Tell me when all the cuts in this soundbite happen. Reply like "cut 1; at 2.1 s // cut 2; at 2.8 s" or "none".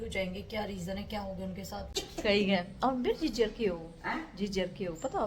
cut 1; at 1.9 s